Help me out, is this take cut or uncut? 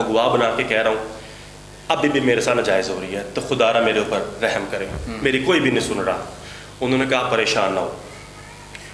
uncut